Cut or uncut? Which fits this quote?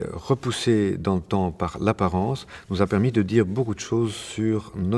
uncut